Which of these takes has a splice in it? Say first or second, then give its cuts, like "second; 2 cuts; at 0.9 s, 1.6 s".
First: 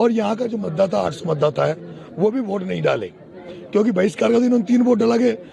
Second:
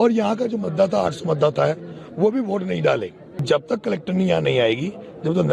second; 1 cut; at 3.4 s